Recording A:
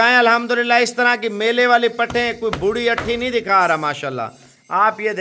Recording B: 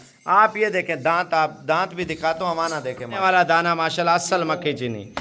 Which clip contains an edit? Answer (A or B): B